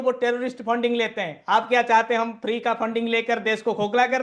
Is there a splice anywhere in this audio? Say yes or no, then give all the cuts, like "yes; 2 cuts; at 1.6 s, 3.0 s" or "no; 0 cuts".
no; 0 cuts